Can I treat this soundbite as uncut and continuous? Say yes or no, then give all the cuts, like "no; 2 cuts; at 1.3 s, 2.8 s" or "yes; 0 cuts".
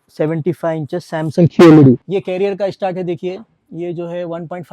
no; 1 cut; at 2.0 s